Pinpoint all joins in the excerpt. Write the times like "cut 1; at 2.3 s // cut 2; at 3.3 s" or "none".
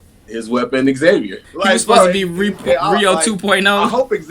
cut 1; at 1.4 s